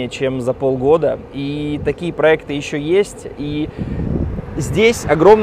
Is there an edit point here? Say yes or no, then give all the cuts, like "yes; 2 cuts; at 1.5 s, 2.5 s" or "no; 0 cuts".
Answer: no; 0 cuts